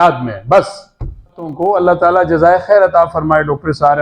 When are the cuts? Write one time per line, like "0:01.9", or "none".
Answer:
0:01.6

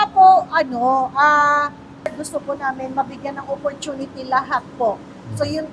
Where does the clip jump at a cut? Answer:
0:02.2

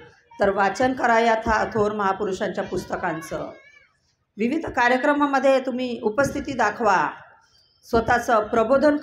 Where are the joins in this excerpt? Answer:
none

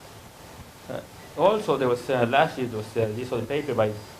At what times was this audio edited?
0:02.1

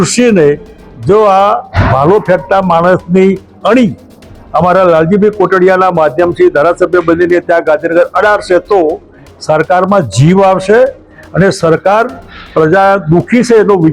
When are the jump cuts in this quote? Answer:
none

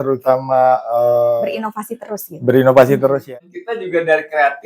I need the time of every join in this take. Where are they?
0:03.3

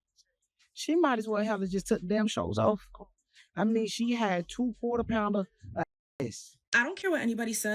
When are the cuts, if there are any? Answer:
0:06.6

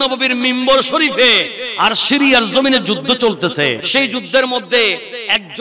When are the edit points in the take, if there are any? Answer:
0:03.8

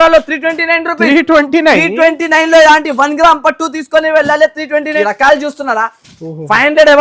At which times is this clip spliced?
0:04.9

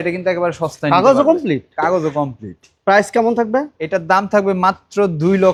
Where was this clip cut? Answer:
none

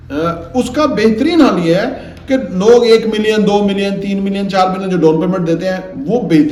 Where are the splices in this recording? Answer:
none

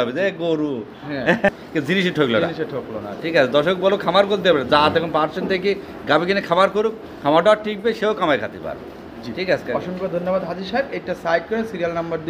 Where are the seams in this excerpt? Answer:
0:01.6

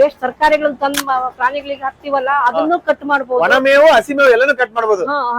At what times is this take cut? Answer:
none

